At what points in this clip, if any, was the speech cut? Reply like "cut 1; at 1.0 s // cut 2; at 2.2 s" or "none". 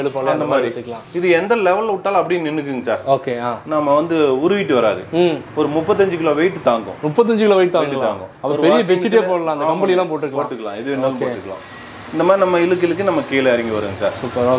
none